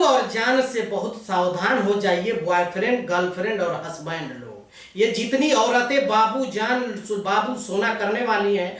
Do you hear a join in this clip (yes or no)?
no